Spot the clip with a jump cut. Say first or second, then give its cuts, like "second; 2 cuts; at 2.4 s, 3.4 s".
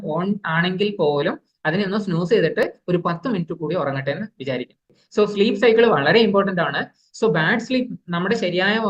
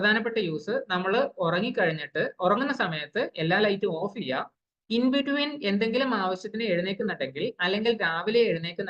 first; 1 cut; at 5.0 s